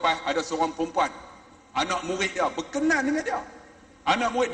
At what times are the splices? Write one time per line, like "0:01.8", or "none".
none

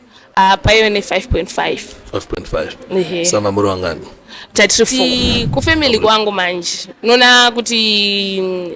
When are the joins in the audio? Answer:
0:05.0

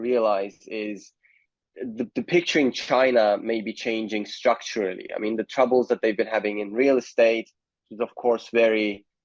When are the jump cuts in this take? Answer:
none

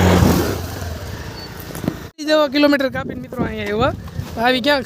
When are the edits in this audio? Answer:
0:02.3

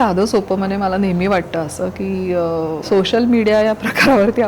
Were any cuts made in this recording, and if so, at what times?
0:02.8

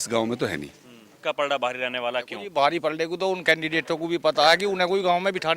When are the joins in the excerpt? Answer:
0:01.1

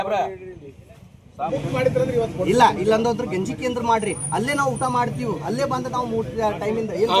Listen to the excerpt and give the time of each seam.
0:01.5

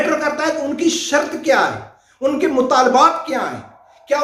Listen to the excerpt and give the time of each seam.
none

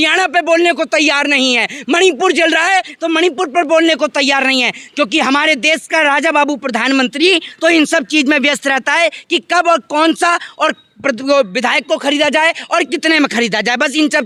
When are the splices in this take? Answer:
none

